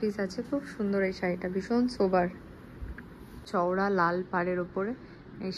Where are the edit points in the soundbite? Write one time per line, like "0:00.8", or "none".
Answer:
0:03.5